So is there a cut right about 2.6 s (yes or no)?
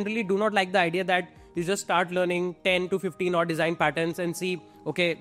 no